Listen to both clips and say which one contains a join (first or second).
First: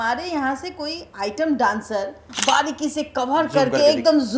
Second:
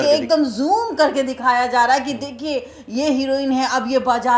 first